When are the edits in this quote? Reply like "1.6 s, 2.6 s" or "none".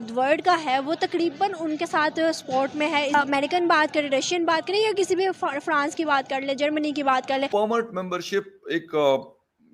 3.1 s, 7.5 s